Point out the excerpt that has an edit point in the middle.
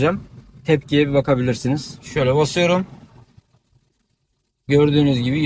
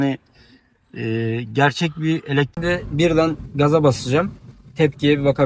second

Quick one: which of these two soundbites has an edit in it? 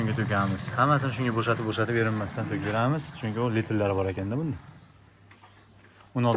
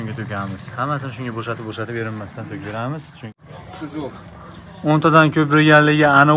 second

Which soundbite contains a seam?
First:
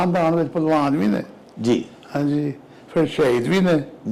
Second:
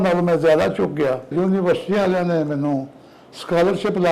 second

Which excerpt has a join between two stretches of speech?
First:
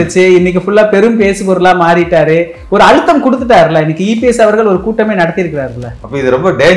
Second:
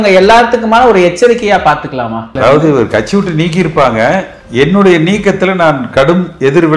second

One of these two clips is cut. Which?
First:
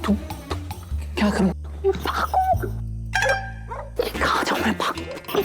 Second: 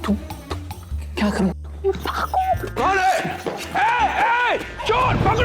second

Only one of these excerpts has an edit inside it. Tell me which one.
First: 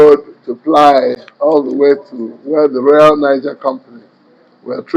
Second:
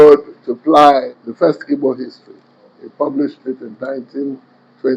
second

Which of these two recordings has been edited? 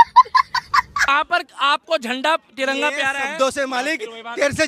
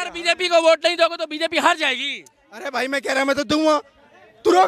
first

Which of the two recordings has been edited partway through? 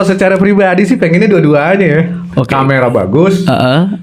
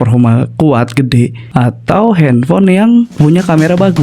second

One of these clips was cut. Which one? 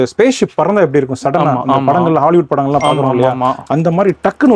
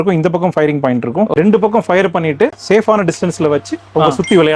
second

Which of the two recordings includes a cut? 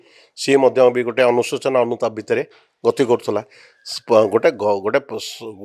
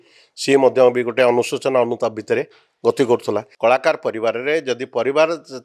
second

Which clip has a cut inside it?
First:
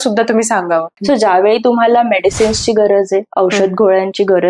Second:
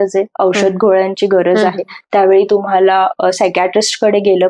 first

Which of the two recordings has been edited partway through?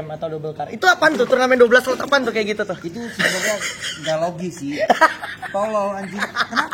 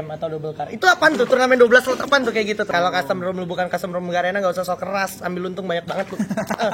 second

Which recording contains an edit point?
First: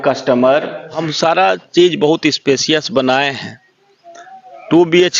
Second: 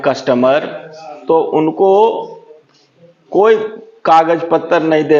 first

